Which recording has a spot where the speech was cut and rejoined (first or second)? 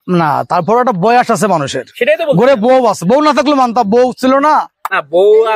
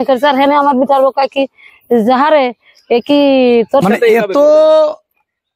second